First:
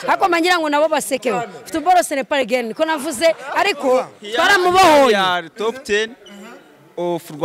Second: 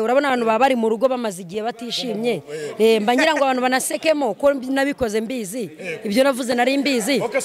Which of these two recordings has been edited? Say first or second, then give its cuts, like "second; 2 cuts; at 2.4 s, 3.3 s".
first; 1 cut; at 4.2 s